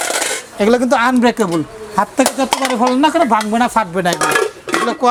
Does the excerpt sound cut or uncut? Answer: uncut